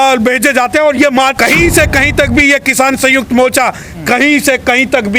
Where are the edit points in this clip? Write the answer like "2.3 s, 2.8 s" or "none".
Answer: 1.3 s